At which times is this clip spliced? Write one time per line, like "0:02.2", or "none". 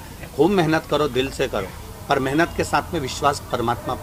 none